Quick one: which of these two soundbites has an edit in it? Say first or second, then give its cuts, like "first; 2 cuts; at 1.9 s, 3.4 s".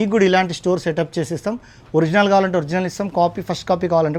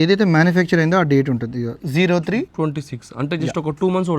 second; 2 cuts; at 1.8 s, 2.5 s